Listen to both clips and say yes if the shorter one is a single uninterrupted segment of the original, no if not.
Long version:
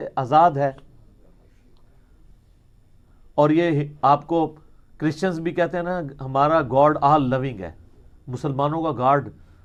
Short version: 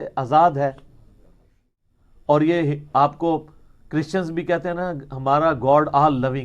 no